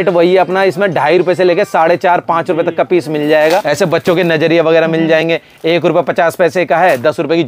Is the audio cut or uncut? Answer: cut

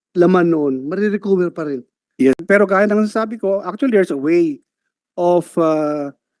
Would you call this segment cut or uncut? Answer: cut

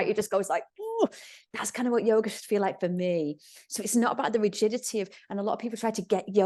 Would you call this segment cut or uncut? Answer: uncut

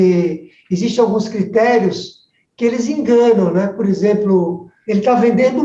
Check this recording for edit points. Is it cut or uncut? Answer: cut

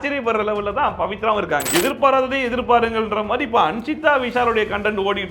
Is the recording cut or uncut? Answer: cut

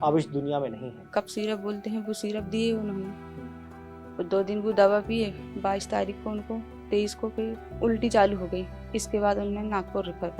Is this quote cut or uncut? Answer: cut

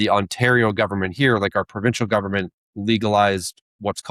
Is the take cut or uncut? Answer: uncut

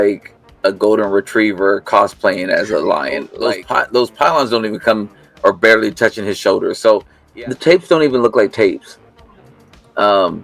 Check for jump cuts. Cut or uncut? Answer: cut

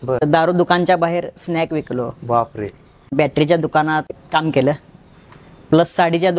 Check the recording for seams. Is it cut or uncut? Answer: uncut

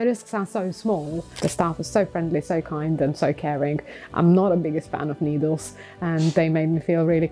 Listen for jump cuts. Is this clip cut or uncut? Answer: cut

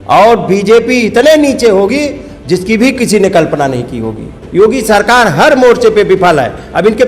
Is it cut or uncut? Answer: cut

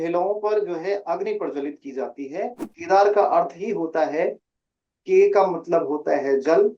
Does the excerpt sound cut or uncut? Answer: cut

